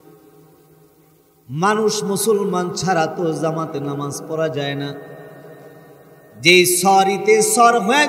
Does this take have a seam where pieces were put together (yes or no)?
no